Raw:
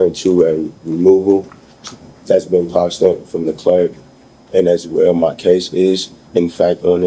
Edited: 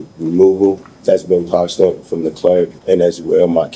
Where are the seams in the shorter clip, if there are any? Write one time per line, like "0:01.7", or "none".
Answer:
0:00.9
0:02.8